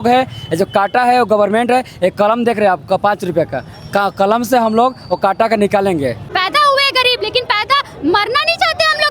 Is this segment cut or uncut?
cut